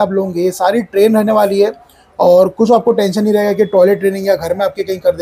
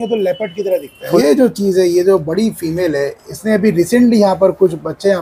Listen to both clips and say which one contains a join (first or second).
second